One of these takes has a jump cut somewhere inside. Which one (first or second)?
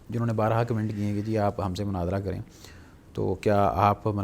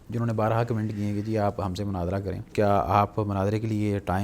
second